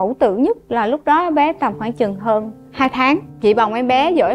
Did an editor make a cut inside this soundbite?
no; 0 cuts

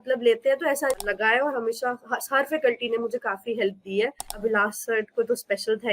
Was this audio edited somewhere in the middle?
yes; 2 cuts; at 1.0 s, 4.3 s

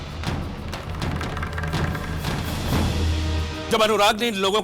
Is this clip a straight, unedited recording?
no; 1 cut; at 3.6 s

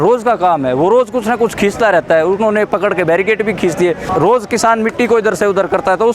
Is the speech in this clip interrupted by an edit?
yes; 1 cut; at 4.0 s

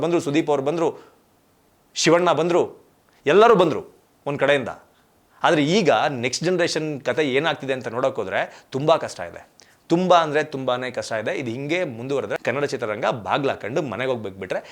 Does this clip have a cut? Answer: yes; 1 cut; at 12.4 s

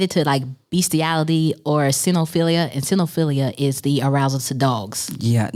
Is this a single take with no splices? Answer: yes; 0 cuts

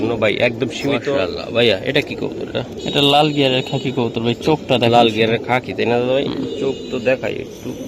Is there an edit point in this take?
yes; 1 cut; at 1.0 s

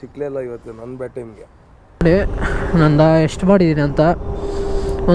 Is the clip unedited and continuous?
no; 1 cut; at 1.9 s

